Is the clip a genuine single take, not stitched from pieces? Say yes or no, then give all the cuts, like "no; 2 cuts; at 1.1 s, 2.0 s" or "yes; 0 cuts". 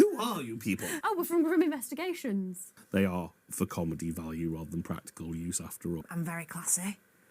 no; 3 cuts; at 0.9 s, 2.7 s, 6.0 s